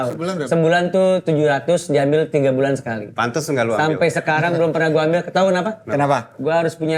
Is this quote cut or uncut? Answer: uncut